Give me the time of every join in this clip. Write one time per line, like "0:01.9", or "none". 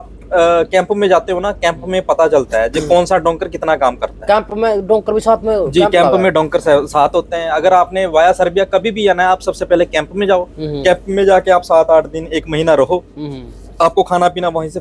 none